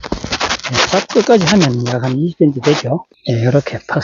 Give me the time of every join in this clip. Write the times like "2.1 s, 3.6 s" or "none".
3.1 s